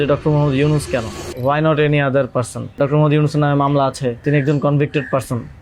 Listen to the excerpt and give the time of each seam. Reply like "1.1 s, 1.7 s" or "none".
1.2 s, 2.8 s, 4.2 s